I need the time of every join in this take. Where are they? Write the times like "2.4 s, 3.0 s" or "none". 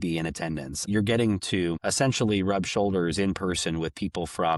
0.9 s, 1.8 s